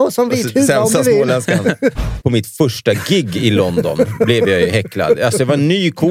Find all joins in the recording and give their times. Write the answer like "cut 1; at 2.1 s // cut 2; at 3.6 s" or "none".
cut 1; at 2.0 s